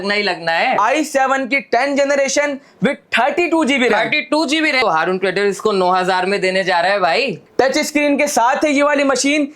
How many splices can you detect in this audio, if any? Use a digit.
3